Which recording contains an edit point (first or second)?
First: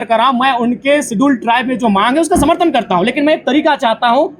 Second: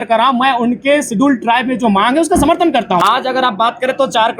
second